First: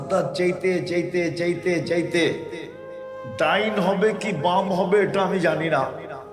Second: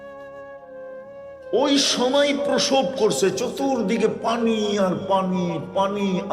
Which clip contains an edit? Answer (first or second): second